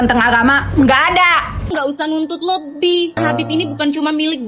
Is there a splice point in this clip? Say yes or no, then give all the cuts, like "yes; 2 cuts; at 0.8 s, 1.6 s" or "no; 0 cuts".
yes; 2 cuts; at 1.7 s, 3.2 s